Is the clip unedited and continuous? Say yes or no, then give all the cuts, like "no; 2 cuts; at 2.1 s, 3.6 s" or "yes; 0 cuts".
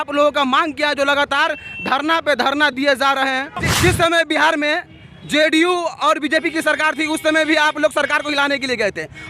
no; 1 cut; at 3.6 s